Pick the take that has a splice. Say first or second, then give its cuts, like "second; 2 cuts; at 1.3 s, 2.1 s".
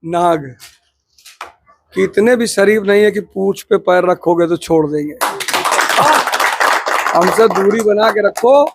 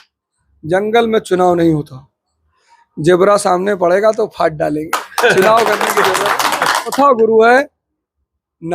second; 1 cut; at 6.9 s